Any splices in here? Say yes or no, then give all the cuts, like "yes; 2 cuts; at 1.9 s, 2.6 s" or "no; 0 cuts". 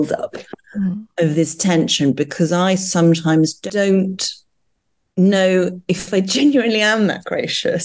yes; 1 cut; at 3.7 s